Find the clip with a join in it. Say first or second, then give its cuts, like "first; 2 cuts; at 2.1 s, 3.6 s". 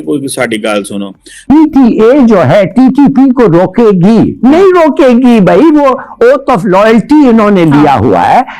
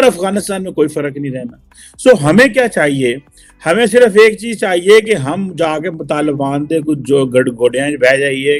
first; 1 cut; at 1.4 s